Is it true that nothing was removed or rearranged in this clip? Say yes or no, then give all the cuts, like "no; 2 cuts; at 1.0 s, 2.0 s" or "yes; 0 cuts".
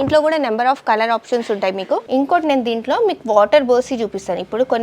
no; 1 cut; at 2.0 s